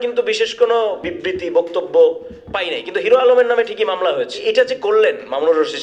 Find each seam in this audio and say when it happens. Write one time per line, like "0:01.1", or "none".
0:01.0
0:04.3

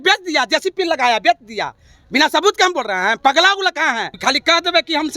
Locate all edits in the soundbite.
0:04.1

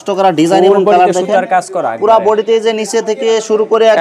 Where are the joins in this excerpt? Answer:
none

